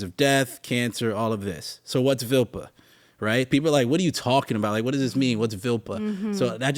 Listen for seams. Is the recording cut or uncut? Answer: uncut